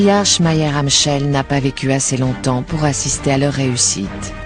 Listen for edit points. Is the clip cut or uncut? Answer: uncut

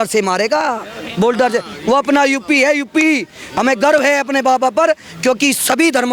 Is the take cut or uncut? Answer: uncut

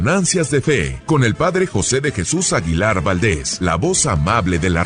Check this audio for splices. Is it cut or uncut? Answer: cut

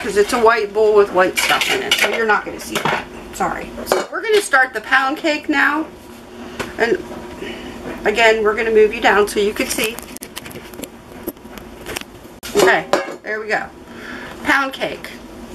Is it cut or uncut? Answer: uncut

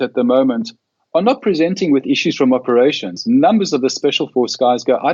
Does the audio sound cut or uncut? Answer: uncut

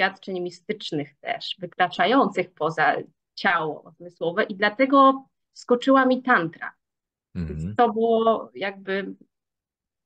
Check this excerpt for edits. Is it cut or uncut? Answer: uncut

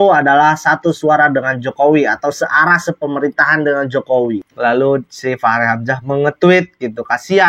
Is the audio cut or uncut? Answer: cut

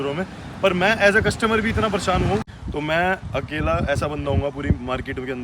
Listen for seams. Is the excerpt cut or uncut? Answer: cut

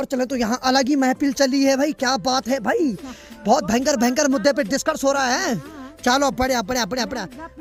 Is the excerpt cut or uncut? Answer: uncut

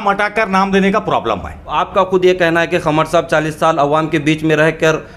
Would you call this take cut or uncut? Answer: cut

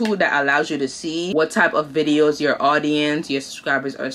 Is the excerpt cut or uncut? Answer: cut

